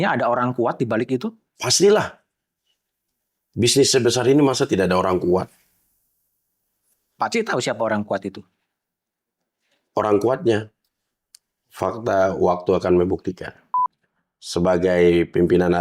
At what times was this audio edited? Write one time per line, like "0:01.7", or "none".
0:13.9